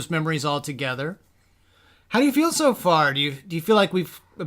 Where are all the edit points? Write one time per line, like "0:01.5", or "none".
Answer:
0:01.2